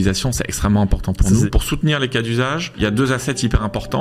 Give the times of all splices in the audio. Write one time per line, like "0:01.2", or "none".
0:01.5
0:02.8